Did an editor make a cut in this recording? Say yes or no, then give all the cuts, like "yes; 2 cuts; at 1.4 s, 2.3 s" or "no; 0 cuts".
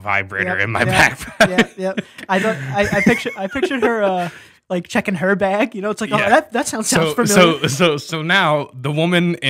no; 0 cuts